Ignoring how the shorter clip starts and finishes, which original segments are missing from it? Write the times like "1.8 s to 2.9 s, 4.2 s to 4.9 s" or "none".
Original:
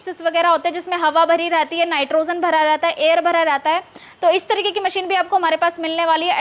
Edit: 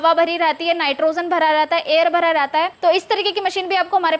3.9 s to 4.1 s